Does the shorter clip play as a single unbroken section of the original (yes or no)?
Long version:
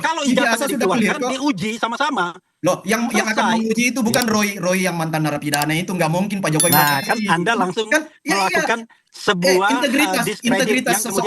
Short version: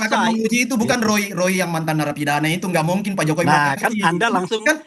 yes